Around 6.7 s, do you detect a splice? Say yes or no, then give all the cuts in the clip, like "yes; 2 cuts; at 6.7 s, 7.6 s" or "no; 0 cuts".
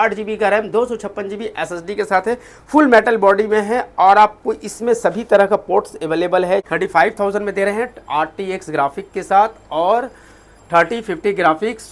yes; 1 cut; at 6.7 s